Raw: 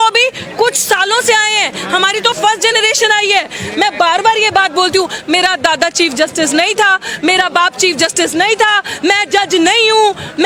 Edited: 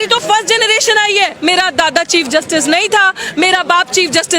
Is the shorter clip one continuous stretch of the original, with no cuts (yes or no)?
no